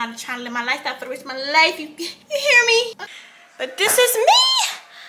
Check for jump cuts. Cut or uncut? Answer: cut